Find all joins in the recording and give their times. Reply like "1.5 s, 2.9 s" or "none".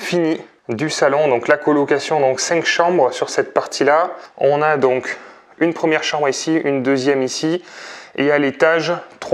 none